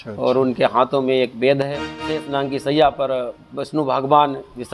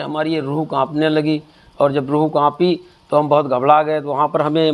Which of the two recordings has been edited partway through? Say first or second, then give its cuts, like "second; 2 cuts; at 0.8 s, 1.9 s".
first; 1 cut; at 2.2 s